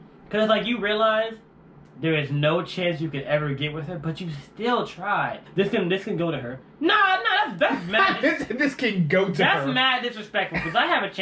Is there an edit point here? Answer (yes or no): yes